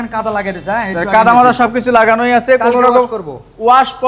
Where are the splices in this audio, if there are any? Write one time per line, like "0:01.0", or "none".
none